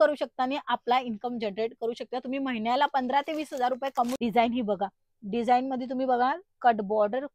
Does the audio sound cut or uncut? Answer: cut